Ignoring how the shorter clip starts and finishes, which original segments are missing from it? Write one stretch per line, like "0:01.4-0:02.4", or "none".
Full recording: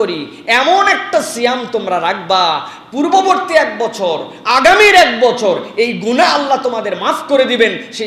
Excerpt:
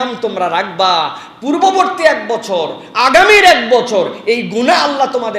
none